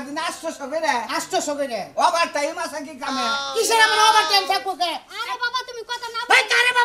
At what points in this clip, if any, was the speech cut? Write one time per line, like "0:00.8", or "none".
0:05.1